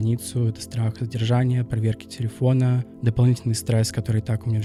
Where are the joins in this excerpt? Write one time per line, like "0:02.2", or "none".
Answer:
none